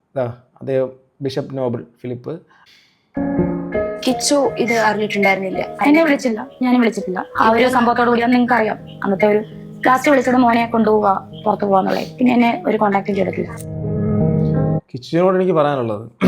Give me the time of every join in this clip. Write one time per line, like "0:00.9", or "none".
0:02.5

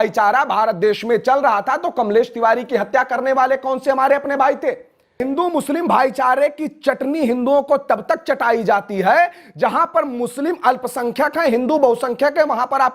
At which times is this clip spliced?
0:05.2

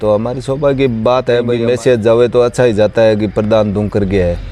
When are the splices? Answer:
0:01.5

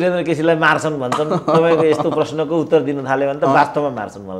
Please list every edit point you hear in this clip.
none

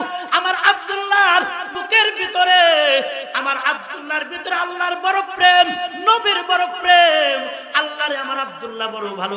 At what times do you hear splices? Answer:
0:01.8

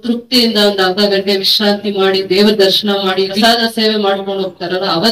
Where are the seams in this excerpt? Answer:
0:03.4

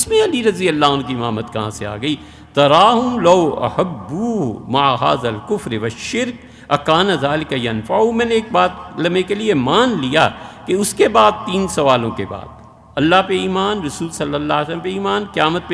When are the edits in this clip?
none

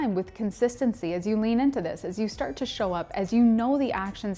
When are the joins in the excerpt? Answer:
none

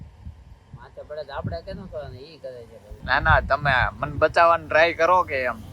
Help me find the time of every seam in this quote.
0:02.9

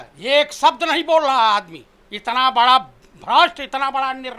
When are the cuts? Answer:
0:02.2

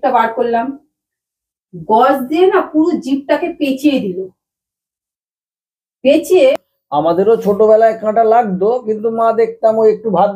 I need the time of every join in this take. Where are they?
0:06.7

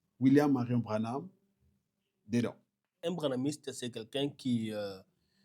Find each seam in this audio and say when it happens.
0:03.0

